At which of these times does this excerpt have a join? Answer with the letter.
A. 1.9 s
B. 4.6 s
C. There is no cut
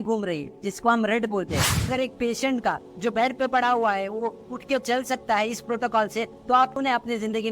A